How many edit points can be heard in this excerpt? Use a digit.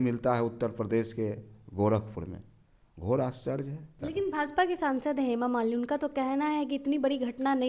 1